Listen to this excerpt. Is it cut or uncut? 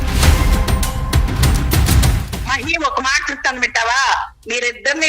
cut